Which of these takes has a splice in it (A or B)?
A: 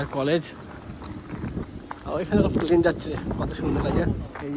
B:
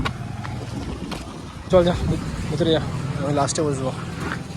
B